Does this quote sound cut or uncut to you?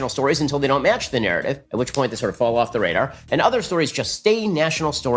cut